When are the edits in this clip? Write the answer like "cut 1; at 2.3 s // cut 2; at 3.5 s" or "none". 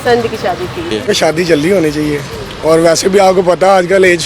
cut 1; at 1.1 s